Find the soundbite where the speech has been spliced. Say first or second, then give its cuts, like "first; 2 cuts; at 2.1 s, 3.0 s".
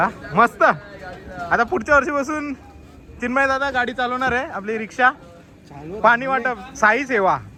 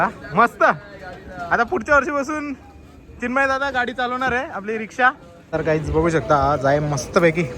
second; 1 cut; at 5.3 s